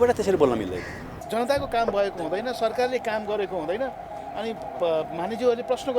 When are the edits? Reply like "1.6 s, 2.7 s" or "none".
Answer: 1.1 s